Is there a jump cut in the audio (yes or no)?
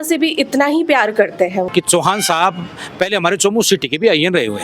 yes